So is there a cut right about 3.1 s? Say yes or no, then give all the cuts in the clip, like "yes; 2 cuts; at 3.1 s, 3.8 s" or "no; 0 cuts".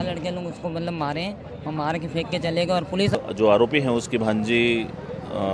yes; 1 cut; at 3.1 s